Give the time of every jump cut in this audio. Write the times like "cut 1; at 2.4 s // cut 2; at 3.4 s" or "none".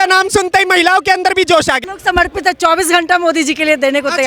cut 1; at 1.8 s